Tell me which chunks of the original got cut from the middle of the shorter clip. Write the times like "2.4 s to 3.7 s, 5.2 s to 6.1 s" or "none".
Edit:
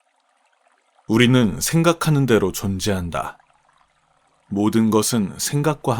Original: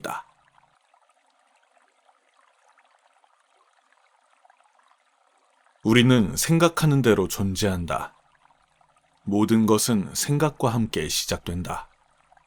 2.2 s to 5.8 s